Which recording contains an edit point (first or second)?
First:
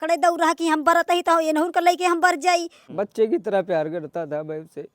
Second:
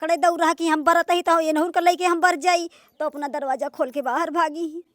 first